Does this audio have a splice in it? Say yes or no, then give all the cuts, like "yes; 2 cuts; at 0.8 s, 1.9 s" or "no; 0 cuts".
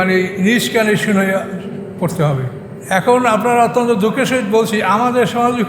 yes; 1 cut; at 2.7 s